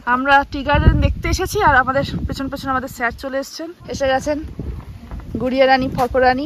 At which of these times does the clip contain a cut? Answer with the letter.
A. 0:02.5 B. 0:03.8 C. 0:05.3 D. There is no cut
B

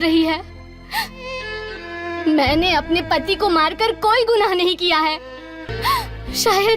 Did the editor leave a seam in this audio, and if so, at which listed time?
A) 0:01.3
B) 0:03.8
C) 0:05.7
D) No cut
C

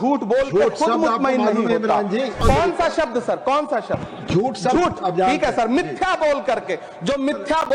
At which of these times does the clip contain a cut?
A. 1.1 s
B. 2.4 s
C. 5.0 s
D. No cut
B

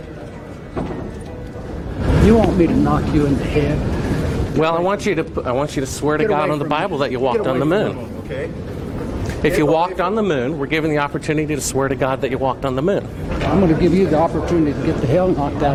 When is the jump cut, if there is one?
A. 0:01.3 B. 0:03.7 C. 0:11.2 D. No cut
D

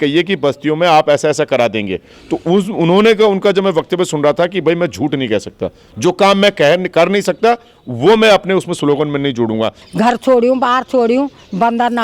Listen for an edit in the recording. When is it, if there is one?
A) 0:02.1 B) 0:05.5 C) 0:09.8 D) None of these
C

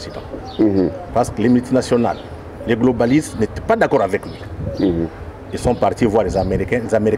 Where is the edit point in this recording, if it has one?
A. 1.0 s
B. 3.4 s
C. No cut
A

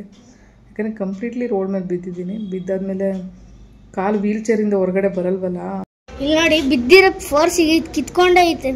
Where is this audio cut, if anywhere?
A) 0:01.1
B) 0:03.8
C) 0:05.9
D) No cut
C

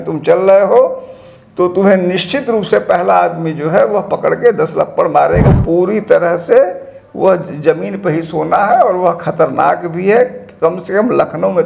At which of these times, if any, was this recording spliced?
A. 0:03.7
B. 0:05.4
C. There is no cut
B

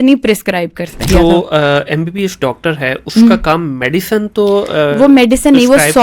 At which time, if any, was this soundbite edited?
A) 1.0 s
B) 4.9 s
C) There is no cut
A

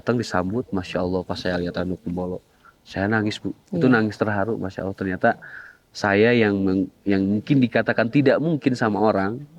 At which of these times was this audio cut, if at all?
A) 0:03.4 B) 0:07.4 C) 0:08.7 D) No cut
D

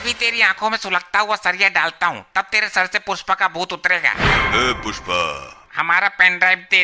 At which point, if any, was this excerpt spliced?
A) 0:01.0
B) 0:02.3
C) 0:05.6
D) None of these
C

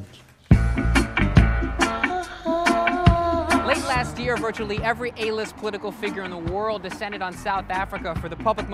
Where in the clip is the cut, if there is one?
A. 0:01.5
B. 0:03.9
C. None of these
A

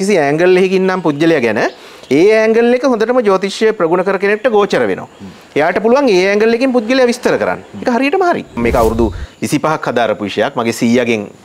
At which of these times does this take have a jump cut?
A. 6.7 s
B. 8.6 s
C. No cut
B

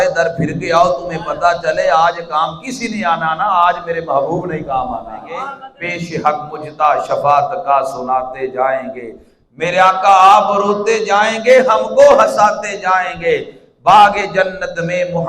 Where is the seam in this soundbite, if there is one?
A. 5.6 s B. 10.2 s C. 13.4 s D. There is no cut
A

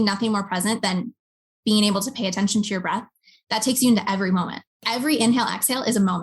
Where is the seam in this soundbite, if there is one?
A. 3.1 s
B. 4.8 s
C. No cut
B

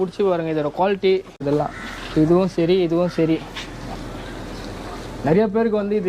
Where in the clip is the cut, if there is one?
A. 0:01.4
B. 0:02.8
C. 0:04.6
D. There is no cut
A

